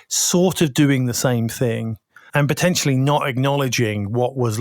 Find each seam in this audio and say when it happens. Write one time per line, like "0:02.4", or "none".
0:02.3